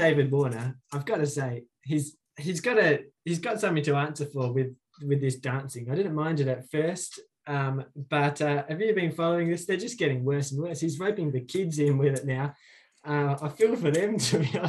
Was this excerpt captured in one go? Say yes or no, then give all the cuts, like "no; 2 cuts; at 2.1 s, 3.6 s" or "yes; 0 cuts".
no; 1 cut; at 2.2 s